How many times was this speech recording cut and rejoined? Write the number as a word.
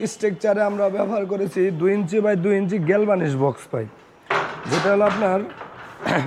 zero